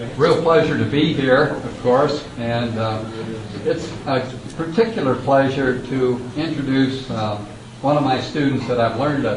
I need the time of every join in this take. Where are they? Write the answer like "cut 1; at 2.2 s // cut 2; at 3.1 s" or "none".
none